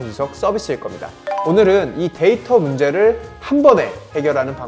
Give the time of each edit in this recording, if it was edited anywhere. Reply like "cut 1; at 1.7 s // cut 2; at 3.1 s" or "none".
cut 1; at 1.1 s